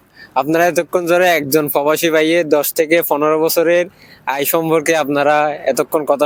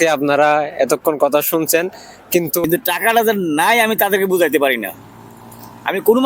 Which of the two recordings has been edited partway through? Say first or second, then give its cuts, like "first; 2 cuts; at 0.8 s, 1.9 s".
second; 1 cut; at 2.6 s